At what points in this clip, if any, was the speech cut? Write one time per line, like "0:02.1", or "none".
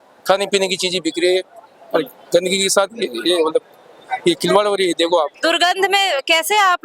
0:05.3